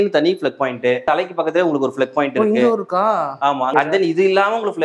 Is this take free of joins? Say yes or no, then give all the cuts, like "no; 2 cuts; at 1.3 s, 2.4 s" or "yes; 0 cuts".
no; 2 cuts; at 1.0 s, 3.7 s